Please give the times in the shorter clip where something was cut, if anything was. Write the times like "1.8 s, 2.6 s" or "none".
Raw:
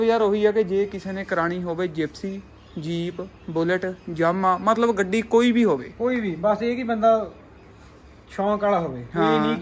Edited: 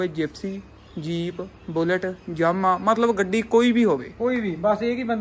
none